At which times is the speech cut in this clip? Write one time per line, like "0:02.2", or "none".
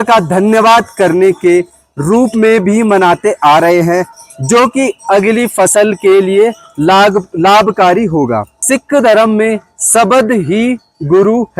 none